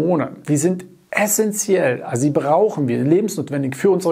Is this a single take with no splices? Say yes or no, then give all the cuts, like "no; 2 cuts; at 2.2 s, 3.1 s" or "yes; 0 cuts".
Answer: yes; 0 cuts